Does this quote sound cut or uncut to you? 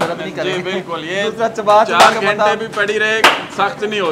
uncut